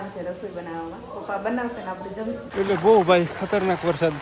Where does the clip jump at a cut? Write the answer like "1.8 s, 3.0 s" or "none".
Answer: 2.4 s